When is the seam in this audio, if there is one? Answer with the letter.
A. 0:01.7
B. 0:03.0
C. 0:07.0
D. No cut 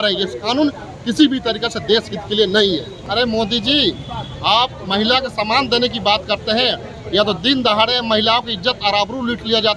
B